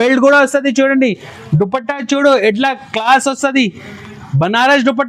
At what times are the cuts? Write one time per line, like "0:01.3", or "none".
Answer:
none